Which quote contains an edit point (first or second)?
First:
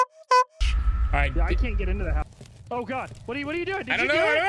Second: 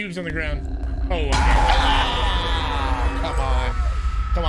first